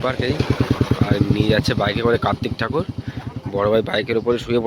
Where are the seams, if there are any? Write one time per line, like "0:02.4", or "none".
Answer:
none